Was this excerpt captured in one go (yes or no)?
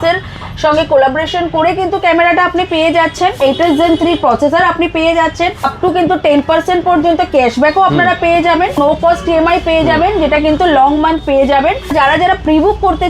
no